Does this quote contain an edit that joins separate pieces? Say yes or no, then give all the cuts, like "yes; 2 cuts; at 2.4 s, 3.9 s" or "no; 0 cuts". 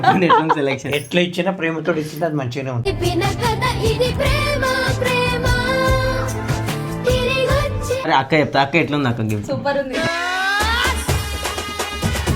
yes; 1 cut; at 8.1 s